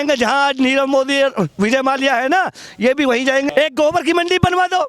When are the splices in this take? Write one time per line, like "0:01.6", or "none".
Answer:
0:03.5